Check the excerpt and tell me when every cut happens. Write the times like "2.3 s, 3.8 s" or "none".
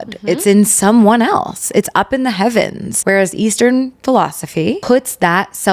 2.9 s, 4.8 s

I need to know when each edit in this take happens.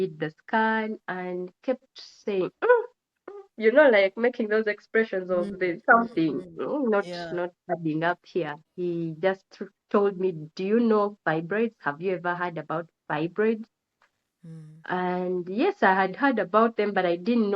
8.6 s

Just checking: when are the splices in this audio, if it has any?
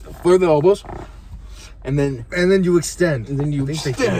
none

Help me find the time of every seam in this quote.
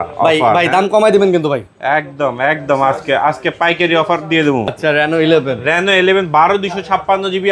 4.7 s

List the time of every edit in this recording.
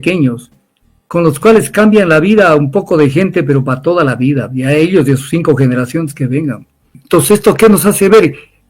7.0 s

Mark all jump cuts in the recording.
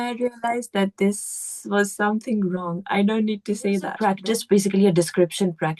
3.9 s

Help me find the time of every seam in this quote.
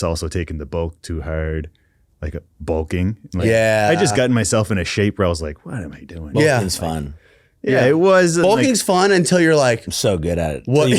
none

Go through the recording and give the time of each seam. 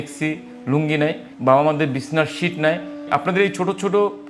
1.3 s, 3.0 s

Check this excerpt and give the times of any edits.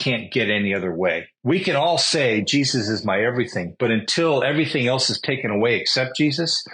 1.3 s

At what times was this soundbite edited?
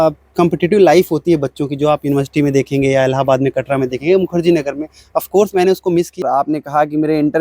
6.2 s

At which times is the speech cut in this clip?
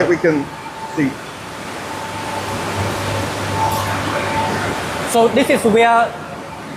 4.8 s

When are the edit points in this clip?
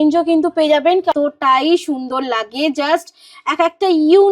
1.1 s

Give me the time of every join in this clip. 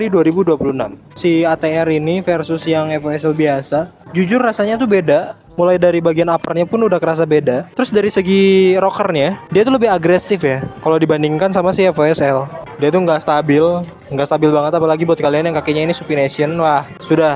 1.1 s, 7.7 s, 12.6 s

